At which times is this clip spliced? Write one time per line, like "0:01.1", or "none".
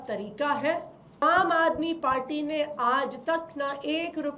0:01.2